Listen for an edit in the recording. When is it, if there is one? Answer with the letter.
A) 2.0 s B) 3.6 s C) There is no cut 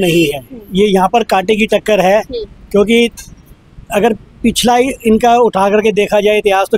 C